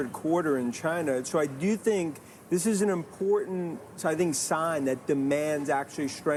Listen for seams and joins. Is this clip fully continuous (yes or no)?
yes